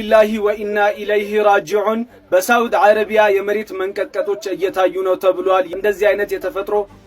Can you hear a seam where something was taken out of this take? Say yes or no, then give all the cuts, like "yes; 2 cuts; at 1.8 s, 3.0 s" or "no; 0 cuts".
yes; 1 cut; at 5.7 s